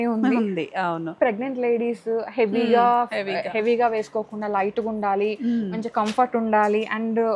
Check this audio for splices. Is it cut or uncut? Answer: cut